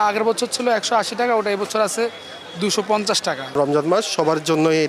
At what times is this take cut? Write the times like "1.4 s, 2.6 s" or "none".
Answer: 3.4 s